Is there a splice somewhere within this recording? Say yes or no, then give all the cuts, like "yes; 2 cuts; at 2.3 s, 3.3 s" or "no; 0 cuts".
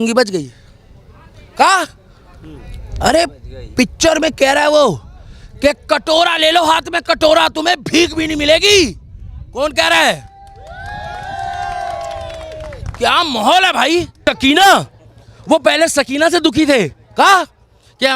yes; 1 cut; at 14.2 s